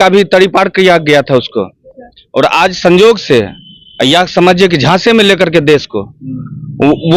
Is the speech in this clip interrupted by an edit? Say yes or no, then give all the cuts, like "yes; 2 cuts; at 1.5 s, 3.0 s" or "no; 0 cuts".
no; 0 cuts